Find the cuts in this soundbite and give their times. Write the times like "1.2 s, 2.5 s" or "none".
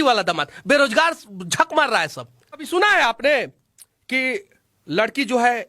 2.6 s